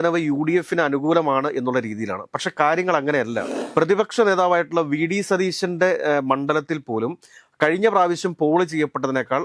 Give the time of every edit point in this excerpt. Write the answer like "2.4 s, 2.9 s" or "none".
3.5 s